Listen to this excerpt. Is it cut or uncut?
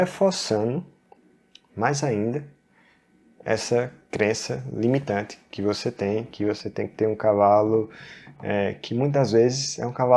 uncut